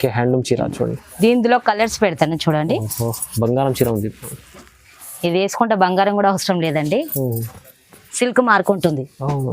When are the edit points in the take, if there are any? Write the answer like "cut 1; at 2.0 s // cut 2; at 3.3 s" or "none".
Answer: cut 1; at 1.0 s